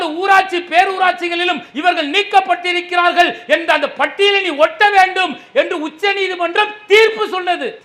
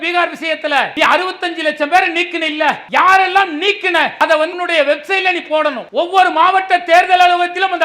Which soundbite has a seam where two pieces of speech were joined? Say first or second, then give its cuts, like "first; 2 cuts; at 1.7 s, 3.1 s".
second; 4 cuts; at 0.9 s, 2.8 s, 4.3 s, 5.8 s